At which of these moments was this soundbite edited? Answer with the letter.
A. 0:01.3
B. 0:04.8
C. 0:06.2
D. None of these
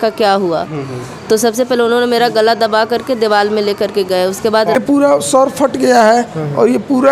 B